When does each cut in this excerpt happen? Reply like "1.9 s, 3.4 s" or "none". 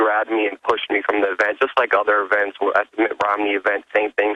2.3 s